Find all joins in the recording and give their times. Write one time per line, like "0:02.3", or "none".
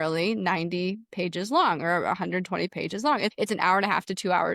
0:03.3